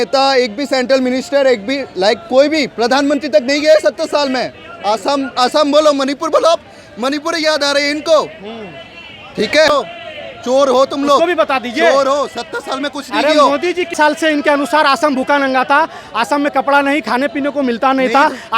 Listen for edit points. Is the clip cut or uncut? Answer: cut